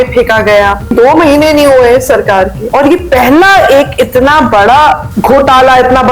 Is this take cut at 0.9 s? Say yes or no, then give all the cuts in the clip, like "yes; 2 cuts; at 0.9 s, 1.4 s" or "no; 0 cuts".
yes; 3 cuts; at 0.9 s, 2.6 s, 5.1 s